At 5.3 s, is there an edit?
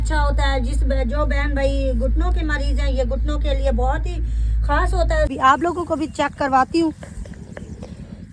yes; 1 cut; at 5.3 s

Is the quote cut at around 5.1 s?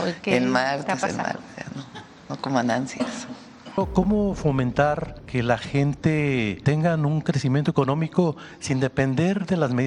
yes; 3 cuts; at 3.8 s, 5.1 s, 6.6 s

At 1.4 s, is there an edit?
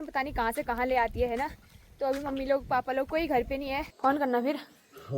no; 1 cut; at 3.9 s

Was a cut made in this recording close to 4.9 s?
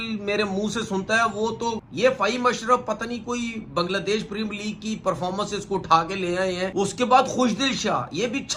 no; 2 cuts; at 1.8 s, 6.7 s

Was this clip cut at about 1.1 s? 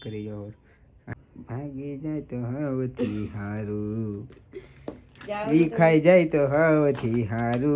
yes; 1 cut; at 1.1 s

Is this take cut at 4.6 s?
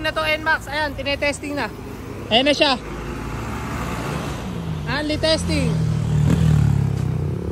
no; 0 cuts

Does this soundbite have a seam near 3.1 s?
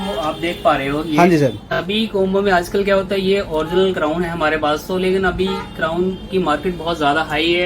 no; 1 cut; at 1.7 s

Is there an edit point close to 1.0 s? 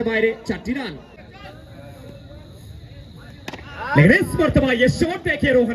yes; 1 cut; at 1.0 s

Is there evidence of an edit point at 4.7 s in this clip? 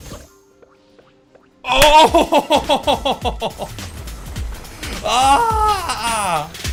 no; 0 cuts

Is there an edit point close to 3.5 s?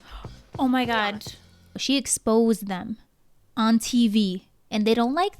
no; 1 cut; at 1.7 s

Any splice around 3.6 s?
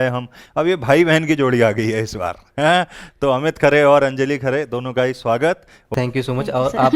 no; 1 cut; at 5.9 s

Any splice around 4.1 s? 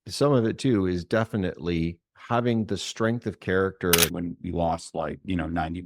yes; 1 cut; at 4.1 s

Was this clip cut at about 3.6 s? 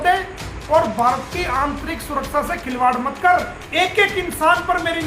yes; 1 cut; at 3.6 s

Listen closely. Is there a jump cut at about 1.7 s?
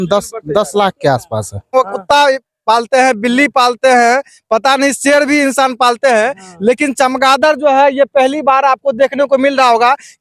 yes; 1 cut; at 1.7 s

